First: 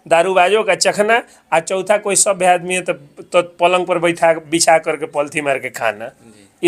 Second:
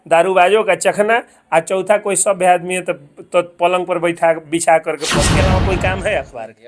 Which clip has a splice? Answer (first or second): second